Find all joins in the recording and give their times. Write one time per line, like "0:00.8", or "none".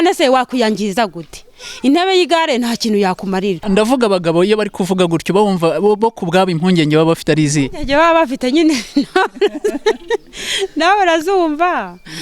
0:03.6